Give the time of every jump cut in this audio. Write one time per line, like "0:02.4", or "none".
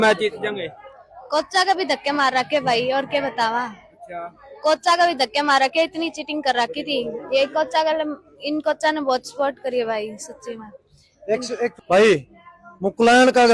0:11.7